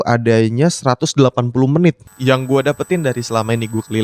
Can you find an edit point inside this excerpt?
yes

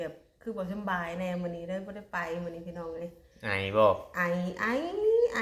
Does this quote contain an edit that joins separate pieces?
no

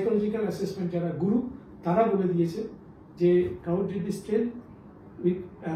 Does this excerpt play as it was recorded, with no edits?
yes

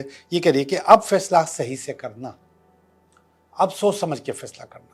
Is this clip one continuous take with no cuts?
yes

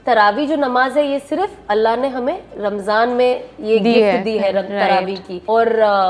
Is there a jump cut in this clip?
no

